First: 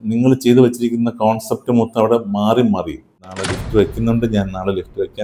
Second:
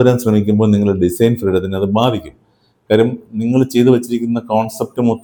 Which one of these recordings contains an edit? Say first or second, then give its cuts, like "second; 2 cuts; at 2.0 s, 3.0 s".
first; 1 cut; at 3.2 s